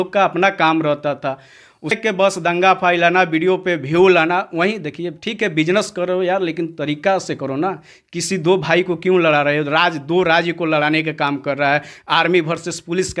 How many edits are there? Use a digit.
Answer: 1